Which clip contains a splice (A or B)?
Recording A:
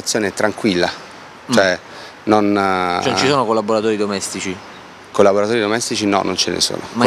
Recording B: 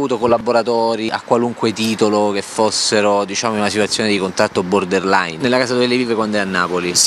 B